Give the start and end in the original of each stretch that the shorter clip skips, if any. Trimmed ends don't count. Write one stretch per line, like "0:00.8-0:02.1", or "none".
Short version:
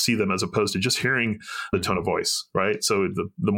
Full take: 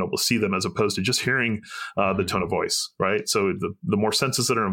0:01.9-0:02.2